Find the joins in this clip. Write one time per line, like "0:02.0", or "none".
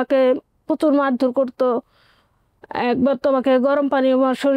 none